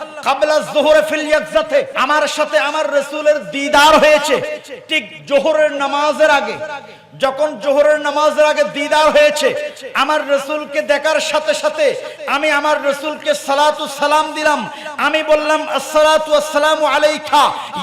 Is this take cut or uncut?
cut